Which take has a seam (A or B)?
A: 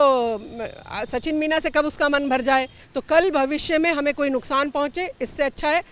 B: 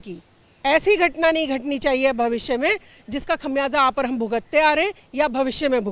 A